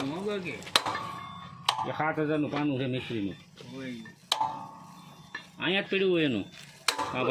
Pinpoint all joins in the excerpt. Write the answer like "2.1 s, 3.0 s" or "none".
none